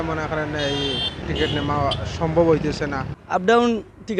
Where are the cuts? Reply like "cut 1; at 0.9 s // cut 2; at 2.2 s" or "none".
cut 1; at 1.2 s // cut 2; at 3.1 s

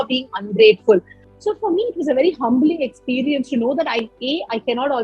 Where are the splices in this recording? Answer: cut 1; at 1.2 s

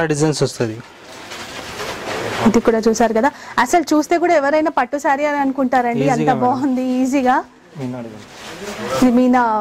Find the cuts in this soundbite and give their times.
none

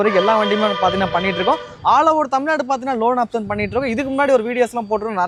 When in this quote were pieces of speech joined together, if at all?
none

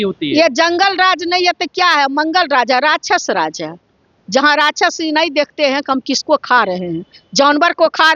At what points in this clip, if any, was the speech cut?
none

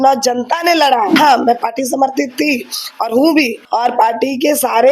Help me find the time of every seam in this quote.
cut 1; at 1.1 s // cut 2; at 3.6 s

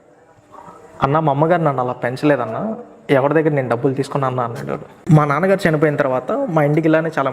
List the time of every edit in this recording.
cut 1; at 4.9 s

